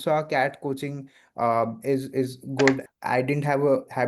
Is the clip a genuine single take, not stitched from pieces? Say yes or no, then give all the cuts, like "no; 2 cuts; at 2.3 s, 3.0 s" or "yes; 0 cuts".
no; 1 cut; at 2.9 s